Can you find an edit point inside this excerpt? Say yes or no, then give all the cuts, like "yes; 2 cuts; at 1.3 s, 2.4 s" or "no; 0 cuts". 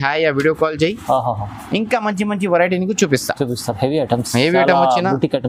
no; 0 cuts